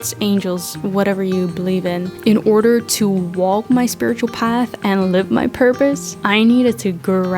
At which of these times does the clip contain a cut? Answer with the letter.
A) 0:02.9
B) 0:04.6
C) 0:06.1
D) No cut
C